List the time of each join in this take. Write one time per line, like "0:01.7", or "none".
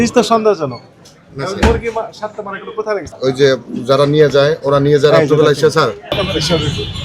0:03.1
0:06.2